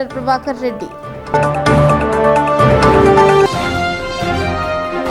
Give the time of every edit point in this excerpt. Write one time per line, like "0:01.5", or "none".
none

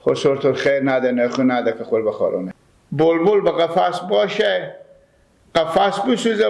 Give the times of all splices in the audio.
0:02.5

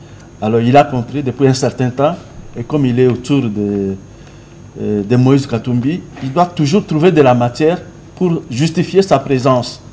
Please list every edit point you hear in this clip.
none

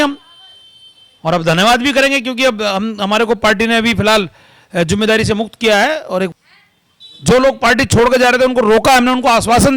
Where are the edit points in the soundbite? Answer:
0:06.3

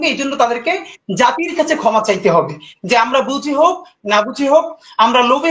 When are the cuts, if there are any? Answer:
none

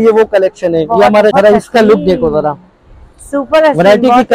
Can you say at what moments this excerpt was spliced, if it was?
0:01.3

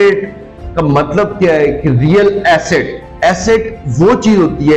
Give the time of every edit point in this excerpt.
0:03.0

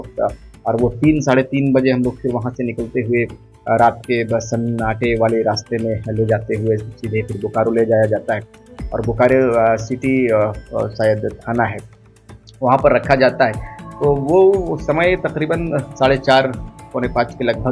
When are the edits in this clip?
none

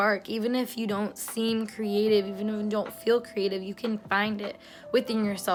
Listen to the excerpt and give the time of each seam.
none

